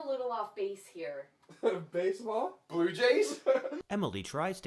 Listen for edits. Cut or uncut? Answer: uncut